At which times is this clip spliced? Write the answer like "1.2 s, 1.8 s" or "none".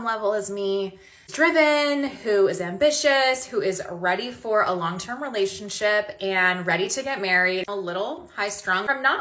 7.7 s